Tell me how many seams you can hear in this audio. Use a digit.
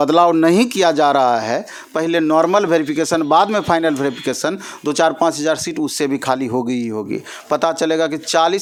0